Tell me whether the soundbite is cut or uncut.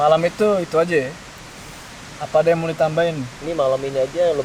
uncut